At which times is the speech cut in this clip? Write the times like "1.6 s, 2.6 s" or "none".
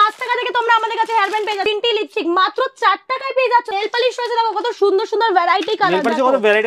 1.7 s, 3.7 s